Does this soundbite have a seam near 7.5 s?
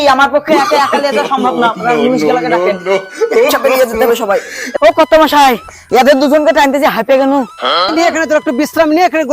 no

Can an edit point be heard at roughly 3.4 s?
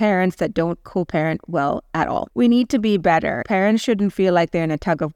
yes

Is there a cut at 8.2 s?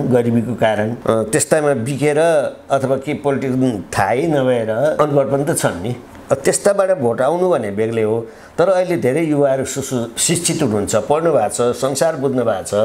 no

